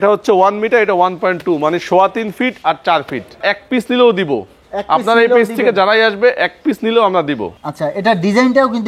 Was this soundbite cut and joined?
yes; 2 cuts; at 3.4 s, 7.5 s

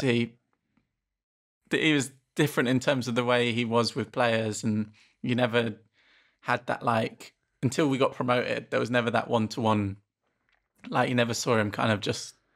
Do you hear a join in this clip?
no; 0 cuts

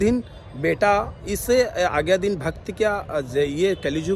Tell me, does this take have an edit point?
no; 0 cuts

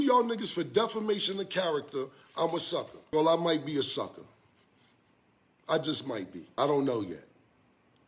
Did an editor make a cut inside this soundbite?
yes; 2 cuts; at 3.0 s, 6.4 s

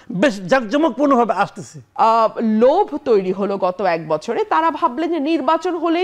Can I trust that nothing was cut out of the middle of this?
no; 1 cut; at 1.8 s

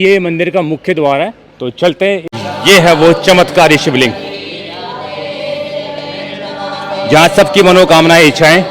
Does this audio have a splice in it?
yes; 1 cut; at 2.3 s

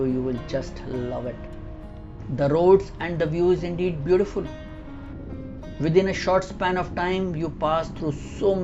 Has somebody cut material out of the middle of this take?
yes; 2 cuts; at 2.1 s, 5.0 s

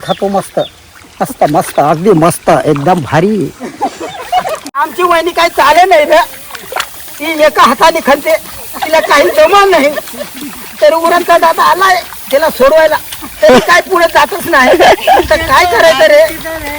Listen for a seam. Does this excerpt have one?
yes; 1 cut; at 4.9 s

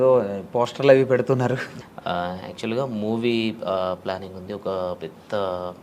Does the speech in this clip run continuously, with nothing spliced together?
no; 1 cut; at 1.8 s

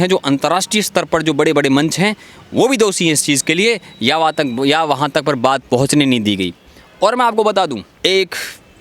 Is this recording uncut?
no; 1 cut; at 7.9 s

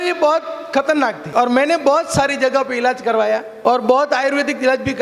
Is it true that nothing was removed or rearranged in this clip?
no; 2 cuts; at 1.2 s, 3.5 s

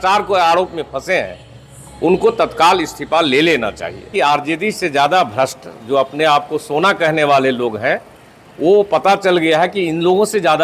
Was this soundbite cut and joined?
yes; 1 cut; at 4.1 s

